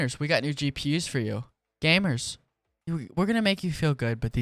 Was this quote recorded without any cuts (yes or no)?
yes